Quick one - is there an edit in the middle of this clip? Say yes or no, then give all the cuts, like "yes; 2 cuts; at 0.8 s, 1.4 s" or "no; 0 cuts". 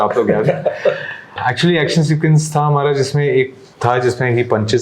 no; 0 cuts